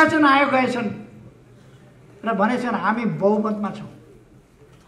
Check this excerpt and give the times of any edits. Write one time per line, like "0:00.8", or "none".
none